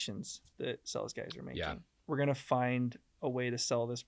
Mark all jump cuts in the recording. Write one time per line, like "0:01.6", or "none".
0:01.9